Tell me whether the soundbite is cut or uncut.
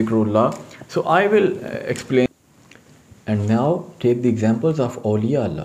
cut